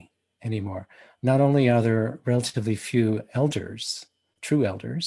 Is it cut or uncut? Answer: uncut